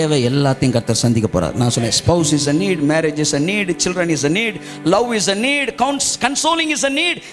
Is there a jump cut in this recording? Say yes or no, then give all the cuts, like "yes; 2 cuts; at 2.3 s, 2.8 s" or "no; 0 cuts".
no; 0 cuts